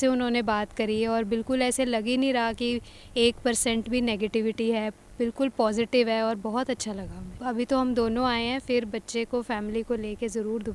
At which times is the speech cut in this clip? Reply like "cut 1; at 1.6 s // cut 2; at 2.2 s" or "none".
cut 1; at 7.3 s

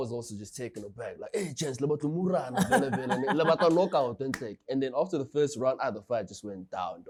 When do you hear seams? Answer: none

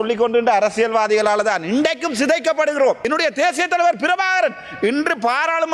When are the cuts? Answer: cut 1; at 3.0 s

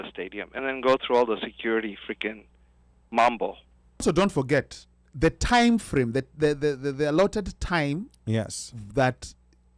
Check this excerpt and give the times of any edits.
cut 1; at 4.0 s

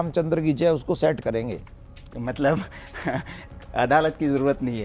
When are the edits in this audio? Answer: none

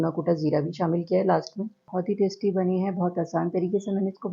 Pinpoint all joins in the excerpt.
cut 1; at 1.9 s

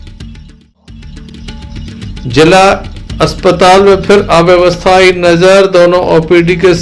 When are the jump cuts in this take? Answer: cut 1; at 1.3 s

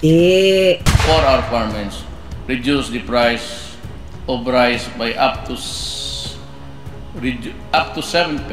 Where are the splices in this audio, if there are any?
cut 1; at 0.9 s

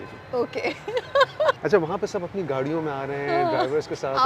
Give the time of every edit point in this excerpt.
cut 1; at 1.6 s

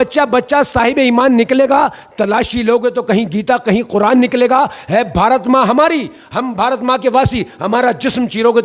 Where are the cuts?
none

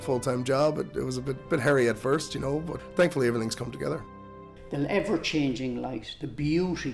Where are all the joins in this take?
cut 1; at 1.4 s // cut 2; at 2.8 s // cut 3; at 4.2 s

